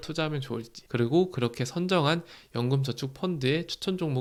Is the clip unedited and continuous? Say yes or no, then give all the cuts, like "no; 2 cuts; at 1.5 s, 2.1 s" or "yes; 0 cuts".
yes; 0 cuts